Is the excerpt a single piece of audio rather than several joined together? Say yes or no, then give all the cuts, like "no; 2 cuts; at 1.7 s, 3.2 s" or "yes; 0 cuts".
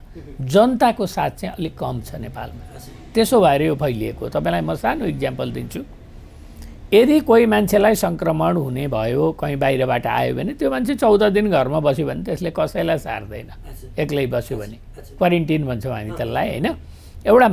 yes; 0 cuts